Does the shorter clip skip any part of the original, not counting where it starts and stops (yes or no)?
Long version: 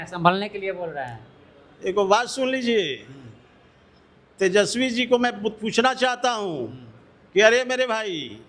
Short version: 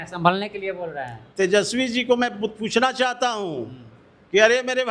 yes